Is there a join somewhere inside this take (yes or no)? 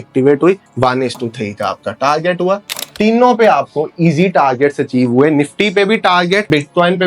yes